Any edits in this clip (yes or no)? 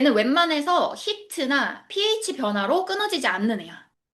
yes